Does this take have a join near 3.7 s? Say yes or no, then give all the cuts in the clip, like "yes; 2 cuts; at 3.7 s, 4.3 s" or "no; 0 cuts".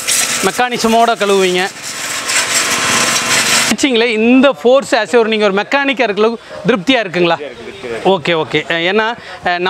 yes; 1 cut; at 3.7 s